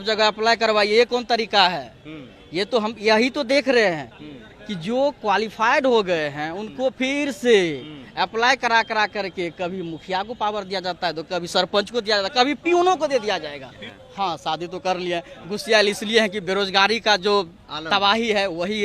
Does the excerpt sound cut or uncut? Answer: cut